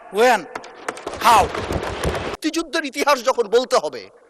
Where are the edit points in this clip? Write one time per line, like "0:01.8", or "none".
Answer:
0:02.3